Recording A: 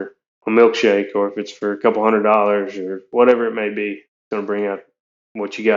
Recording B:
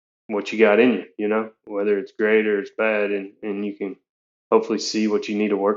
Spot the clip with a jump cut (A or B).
A